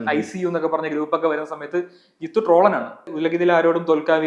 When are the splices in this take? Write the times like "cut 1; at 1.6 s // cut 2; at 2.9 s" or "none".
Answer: cut 1; at 3.1 s